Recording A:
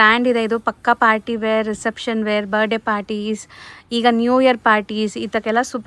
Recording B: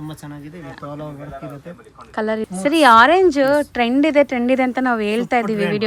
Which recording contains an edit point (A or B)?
B